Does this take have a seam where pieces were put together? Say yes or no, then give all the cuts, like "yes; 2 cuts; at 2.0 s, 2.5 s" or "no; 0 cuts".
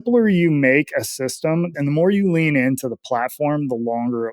yes; 1 cut; at 1.7 s